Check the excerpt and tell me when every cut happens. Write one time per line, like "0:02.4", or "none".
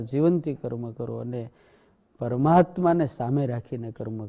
none